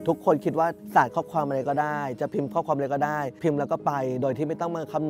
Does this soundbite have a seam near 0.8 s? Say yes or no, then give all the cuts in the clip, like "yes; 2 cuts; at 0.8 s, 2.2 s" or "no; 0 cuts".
yes; 2 cuts; at 0.8 s, 3.4 s